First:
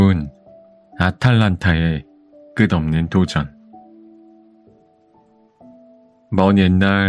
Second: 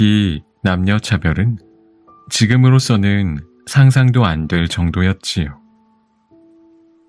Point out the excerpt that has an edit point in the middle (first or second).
second